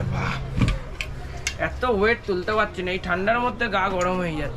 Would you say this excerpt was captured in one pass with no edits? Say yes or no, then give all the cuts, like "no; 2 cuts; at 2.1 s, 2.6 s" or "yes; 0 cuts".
yes; 0 cuts